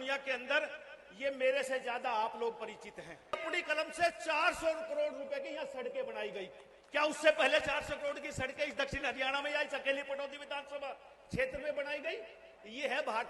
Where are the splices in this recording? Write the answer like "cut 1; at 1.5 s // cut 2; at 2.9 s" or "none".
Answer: cut 1; at 3.4 s